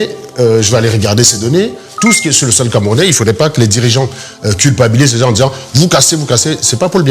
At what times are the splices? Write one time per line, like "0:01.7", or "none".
0:01.8